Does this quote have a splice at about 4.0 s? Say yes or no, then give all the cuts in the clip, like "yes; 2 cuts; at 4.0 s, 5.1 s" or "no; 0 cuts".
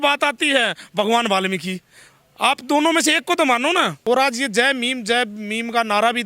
yes; 1 cut; at 4.0 s